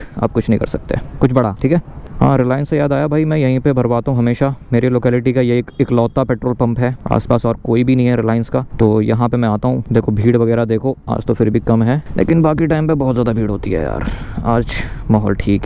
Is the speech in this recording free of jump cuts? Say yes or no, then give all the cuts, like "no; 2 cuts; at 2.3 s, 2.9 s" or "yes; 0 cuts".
yes; 0 cuts